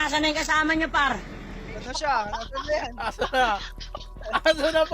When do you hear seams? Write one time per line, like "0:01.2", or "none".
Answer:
0:01.2